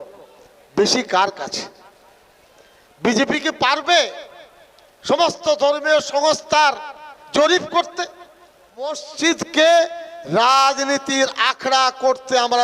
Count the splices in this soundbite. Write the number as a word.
one